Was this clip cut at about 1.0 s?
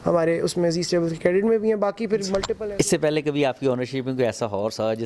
no; 1 cut; at 2.6 s

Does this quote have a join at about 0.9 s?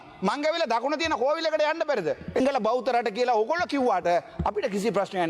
no; 1 cut; at 2.4 s

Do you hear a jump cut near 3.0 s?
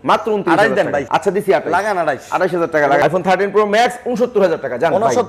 yes; 2 cuts; at 1.1 s, 3.0 s

